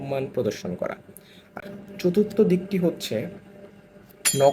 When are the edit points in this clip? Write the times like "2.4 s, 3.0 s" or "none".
1.5 s